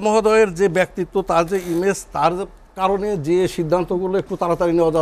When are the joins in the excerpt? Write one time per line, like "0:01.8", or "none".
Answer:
none